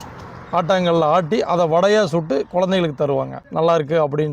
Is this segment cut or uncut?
cut